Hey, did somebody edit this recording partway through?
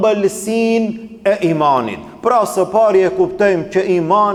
no; 0 cuts

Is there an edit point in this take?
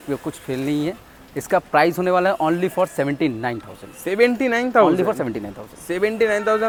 no; 0 cuts

